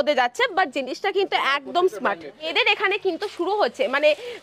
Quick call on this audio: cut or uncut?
cut